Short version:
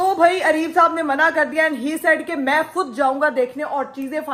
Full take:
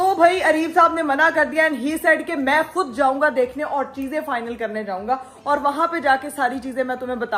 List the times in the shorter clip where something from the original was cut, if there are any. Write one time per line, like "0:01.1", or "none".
none